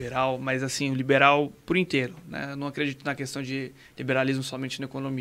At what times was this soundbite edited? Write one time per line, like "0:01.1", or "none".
none